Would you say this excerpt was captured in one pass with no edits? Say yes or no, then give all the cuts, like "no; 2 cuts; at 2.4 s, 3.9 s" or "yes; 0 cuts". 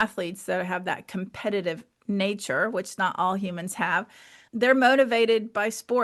yes; 0 cuts